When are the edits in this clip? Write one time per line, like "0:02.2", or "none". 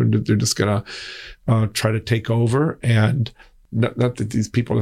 0:03.6